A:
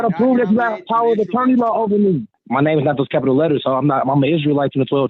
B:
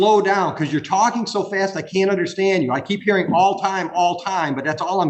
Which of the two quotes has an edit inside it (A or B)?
A